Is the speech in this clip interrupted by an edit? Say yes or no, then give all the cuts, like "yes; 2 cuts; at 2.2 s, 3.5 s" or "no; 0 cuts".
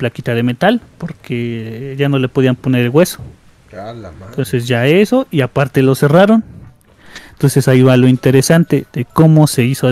no; 0 cuts